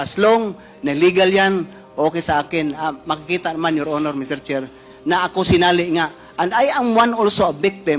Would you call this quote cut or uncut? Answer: cut